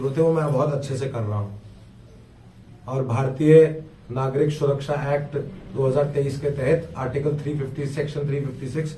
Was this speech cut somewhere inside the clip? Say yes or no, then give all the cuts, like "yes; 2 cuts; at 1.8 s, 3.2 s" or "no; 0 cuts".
no; 0 cuts